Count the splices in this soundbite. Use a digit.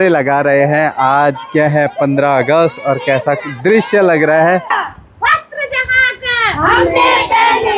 1